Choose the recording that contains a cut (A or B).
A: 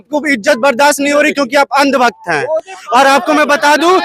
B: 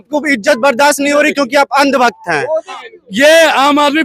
B